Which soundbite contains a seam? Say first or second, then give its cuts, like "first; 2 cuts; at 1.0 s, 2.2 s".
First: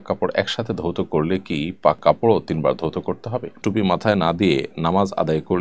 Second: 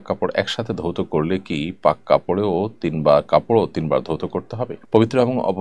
first; 2 cuts; at 2.0 s, 3.6 s